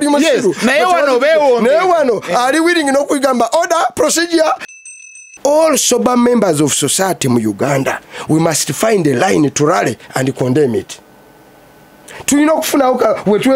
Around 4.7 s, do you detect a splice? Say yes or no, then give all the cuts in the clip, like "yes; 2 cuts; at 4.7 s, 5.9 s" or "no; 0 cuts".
yes; 1 cut; at 4.7 s